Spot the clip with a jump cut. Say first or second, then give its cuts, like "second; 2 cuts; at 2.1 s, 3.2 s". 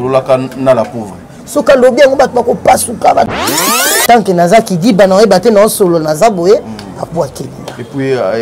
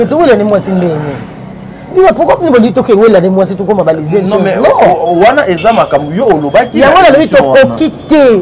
first; 1 cut; at 3.7 s